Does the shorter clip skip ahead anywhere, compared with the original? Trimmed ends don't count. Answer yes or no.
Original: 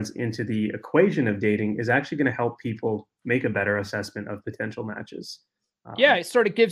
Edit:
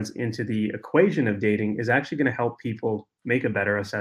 no